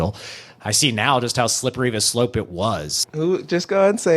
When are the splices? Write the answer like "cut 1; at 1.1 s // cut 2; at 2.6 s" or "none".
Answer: cut 1; at 3.0 s